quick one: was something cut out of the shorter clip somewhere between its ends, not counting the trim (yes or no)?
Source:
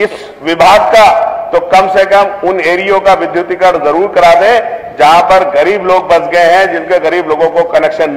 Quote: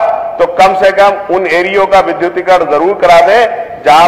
no